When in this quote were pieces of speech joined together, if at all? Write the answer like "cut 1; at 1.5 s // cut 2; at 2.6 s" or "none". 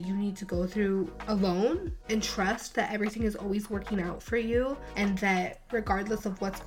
none